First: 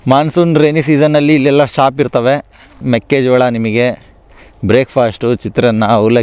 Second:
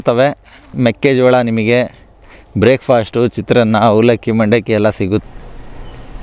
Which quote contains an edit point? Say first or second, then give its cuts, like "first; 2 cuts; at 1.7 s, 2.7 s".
second; 1 cut; at 5.2 s